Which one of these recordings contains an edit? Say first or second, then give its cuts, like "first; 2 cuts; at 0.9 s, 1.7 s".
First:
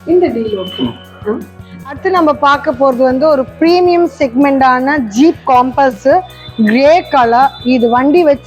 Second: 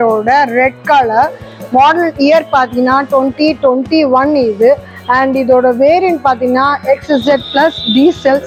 first; 1 cut; at 1.8 s